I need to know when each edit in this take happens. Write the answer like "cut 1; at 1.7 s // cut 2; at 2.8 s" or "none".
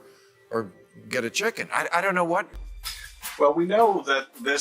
cut 1; at 2.7 s

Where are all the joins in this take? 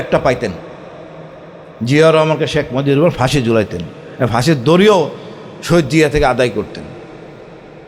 none

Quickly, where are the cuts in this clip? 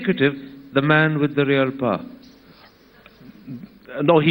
cut 1; at 2.7 s

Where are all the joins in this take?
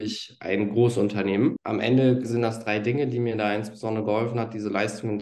cut 1; at 1.6 s

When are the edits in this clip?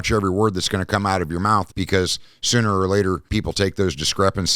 cut 1; at 1.7 s

